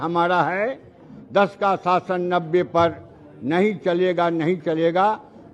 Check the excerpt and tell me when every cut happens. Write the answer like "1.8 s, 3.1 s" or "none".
none